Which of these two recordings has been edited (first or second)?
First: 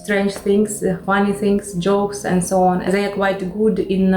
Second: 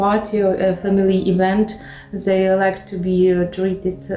first